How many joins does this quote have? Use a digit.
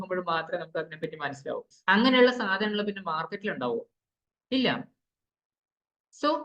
1